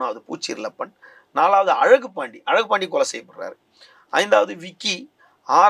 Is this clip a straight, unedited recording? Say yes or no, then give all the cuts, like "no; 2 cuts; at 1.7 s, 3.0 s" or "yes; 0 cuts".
yes; 0 cuts